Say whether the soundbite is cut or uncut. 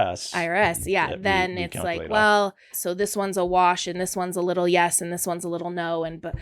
cut